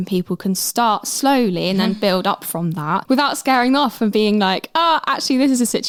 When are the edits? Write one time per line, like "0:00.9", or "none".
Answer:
none